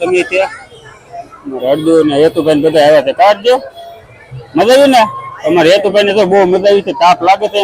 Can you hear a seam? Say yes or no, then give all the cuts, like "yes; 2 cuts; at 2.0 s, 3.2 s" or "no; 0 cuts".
no; 0 cuts